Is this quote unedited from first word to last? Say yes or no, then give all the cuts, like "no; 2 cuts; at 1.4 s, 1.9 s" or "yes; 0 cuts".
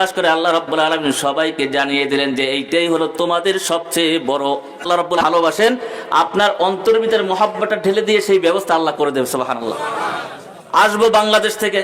no; 1 cut; at 5.2 s